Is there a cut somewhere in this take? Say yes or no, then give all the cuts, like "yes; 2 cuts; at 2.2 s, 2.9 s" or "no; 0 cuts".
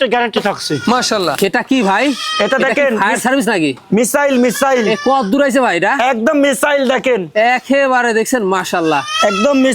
yes; 1 cut; at 1.4 s